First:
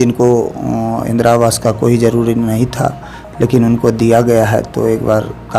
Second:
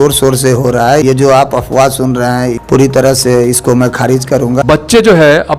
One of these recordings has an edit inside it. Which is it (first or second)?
second